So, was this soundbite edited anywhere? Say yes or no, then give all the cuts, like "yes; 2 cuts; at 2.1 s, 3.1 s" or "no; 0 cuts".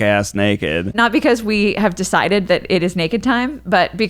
yes; 1 cut; at 0.9 s